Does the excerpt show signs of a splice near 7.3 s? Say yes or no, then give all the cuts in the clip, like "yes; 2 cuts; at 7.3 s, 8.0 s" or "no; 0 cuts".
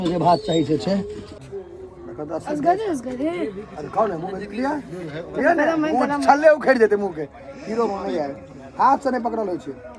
no; 1 cut; at 1.4 s